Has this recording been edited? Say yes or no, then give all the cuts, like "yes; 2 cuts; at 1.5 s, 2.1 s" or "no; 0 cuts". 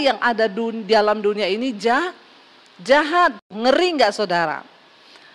yes; 1 cut; at 3.4 s